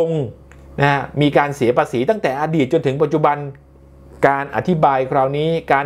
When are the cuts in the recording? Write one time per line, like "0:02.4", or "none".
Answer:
none